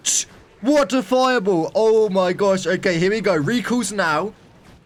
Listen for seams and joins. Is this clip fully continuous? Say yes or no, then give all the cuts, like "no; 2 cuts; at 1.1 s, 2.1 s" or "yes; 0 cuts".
yes; 0 cuts